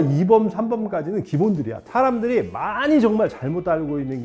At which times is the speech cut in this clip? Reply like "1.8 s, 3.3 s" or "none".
1.9 s